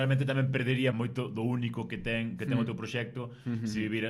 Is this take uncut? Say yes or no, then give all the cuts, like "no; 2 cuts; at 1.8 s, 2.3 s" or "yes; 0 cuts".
no; 1 cut; at 0.9 s